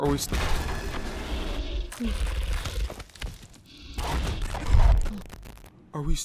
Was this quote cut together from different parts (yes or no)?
no